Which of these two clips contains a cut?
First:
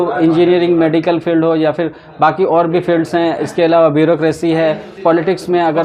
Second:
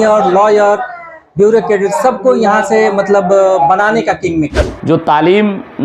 second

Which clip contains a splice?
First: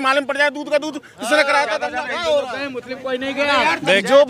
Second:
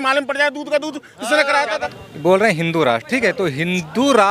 second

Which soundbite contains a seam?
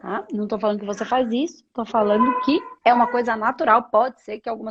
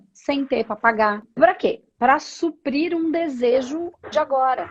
second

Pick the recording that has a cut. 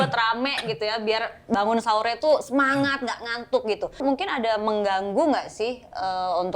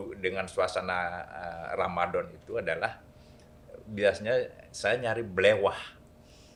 first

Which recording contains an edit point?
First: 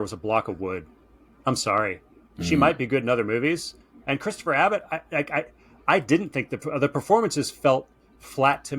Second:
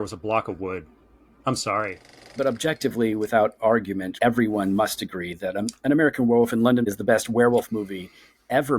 second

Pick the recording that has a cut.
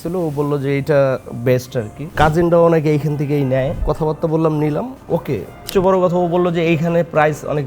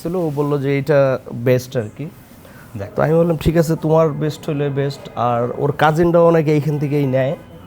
first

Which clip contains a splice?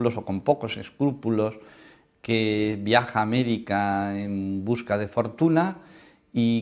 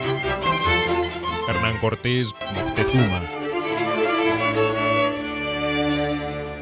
first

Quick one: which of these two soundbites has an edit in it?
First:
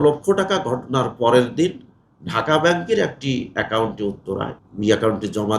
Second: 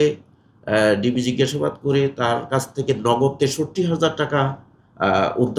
first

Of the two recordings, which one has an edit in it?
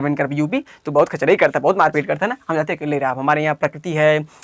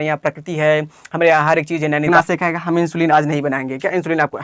second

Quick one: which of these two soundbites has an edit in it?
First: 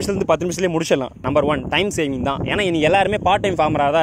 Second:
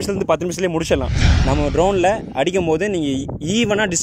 second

